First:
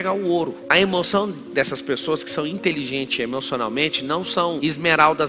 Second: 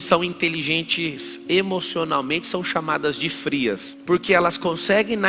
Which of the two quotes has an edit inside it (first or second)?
second